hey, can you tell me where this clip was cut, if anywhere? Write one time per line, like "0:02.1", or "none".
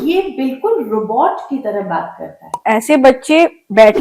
0:02.6